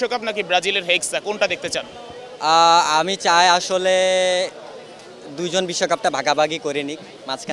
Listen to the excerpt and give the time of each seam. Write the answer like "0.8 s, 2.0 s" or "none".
none